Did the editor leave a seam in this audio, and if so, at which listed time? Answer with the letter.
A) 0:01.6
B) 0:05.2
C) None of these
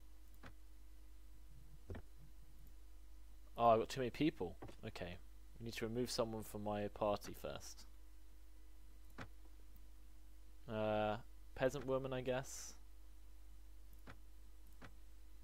C